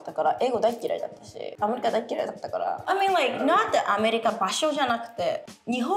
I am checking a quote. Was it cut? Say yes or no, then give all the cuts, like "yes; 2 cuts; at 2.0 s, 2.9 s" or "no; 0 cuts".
yes; 2 cuts; at 1.5 s, 2.9 s